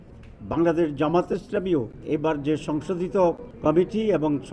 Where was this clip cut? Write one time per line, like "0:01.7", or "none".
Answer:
0:02.0
0:03.5